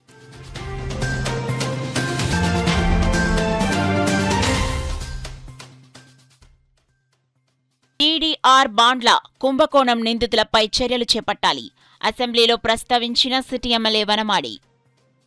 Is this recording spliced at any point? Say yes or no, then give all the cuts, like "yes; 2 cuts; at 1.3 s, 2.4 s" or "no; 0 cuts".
yes; 1 cut; at 1.3 s